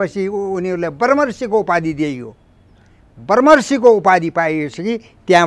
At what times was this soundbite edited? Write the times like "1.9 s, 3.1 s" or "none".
none